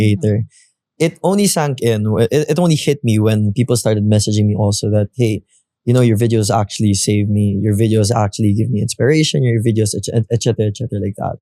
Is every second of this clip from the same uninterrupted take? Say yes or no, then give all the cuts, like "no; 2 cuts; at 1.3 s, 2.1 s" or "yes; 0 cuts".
yes; 0 cuts